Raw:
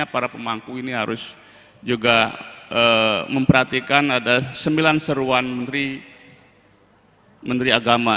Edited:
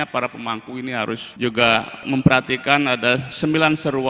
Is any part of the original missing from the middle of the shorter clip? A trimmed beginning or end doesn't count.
yes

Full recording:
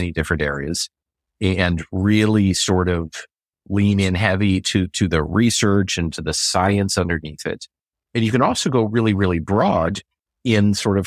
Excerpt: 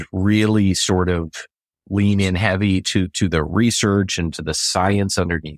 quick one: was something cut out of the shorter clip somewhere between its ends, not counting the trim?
no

